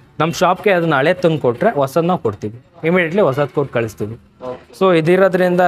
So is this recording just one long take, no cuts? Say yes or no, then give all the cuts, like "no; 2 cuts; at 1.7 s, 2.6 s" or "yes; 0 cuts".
yes; 0 cuts